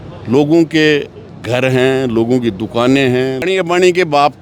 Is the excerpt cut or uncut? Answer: cut